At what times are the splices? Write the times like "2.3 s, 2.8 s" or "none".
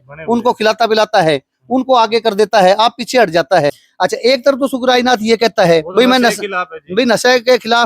3.8 s